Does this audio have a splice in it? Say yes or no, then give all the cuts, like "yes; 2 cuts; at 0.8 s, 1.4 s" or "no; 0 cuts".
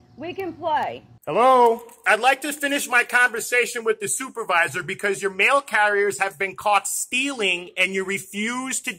yes; 2 cuts; at 1.1 s, 1.9 s